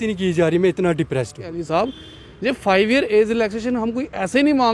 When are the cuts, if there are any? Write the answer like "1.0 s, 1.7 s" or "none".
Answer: 1.5 s